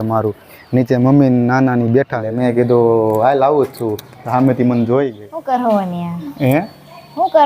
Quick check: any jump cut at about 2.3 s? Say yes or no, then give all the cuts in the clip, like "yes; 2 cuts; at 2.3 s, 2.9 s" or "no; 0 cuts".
yes; 2 cuts; at 2.3 s, 5.3 s